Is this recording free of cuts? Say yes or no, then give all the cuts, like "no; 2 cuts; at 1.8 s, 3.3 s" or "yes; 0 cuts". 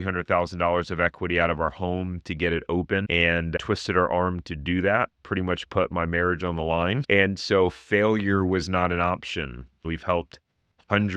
no; 1 cut; at 9.9 s